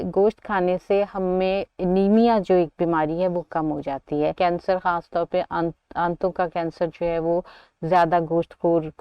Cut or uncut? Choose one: cut